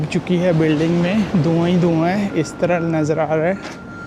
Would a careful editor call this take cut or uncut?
uncut